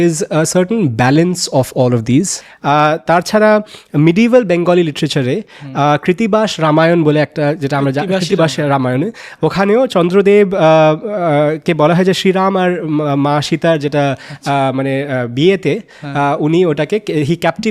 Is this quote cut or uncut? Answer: cut